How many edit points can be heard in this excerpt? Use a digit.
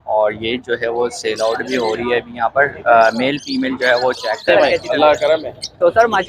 1